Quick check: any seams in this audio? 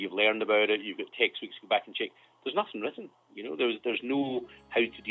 no; 0 cuts

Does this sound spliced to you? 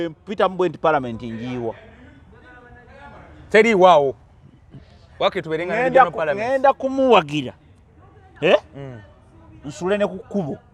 no; 0 cuts

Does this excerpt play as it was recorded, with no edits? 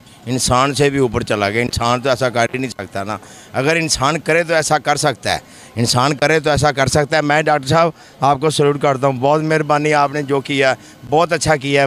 yes; 0 cuts

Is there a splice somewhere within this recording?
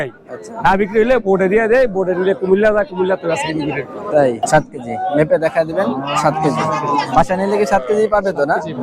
yes; 1 cut; at 4.5 s

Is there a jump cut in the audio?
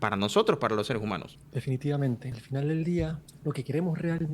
yes; 3 cuts; at 1.4 s, 2.3 s, 3.3 s

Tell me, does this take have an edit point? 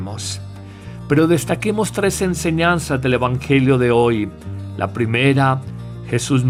no; 0 cuts

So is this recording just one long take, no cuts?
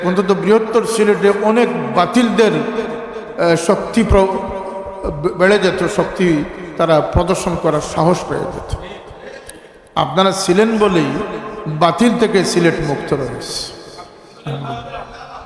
yes; 0 cuts

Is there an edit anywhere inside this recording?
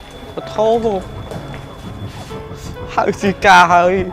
no; 0 cuts

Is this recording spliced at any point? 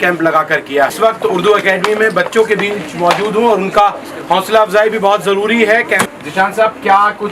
yes; 2 cuts; at 0.9 s, 6.0 s

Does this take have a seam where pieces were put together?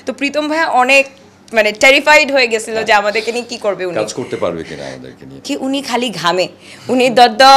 yes; 1 cut; at 5.5 s

